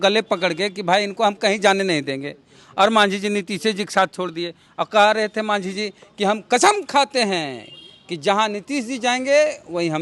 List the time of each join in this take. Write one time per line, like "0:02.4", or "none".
none